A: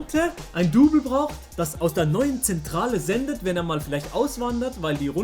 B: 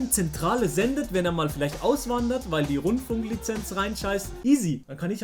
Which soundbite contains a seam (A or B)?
B